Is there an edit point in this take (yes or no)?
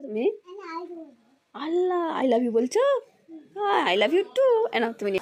no